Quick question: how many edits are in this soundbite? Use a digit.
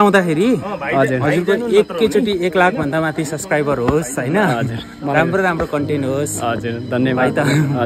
0